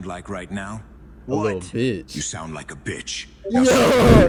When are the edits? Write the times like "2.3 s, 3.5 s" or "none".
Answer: none